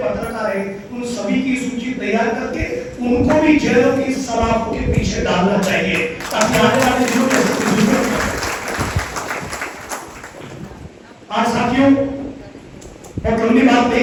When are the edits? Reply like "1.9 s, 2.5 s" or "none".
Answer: none